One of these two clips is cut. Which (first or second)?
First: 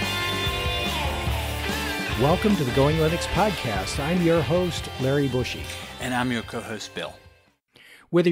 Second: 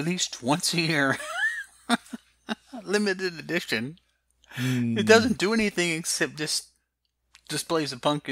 second